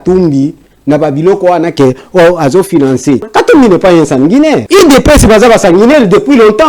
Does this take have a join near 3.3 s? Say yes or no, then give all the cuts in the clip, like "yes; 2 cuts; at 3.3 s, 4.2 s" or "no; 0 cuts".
yes; 2 cuts; at 3.3 s, 4.6 s